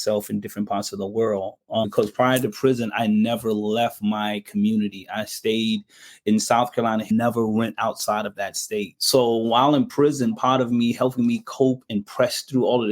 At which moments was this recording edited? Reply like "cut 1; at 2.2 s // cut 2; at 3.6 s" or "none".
cut 1; at 1.8 s // cut 2; at 7.1 s // cut 3; at 9.0 s // cut 4; at 11.8 s